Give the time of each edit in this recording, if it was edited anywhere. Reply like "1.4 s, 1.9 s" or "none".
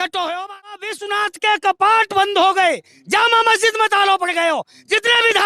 1.0 s